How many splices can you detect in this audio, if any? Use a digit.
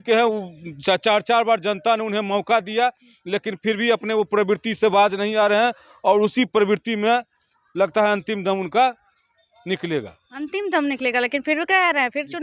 0